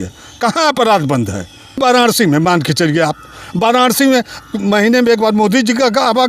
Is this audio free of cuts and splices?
no; 1 cut; at 1.8 s

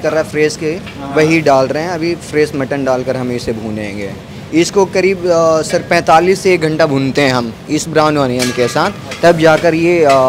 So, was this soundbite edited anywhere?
no; 0 cuts

